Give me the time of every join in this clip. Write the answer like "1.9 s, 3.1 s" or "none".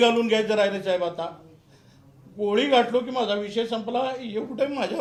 none